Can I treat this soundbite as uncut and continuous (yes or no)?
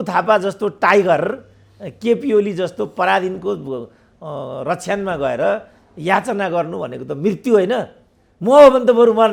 yes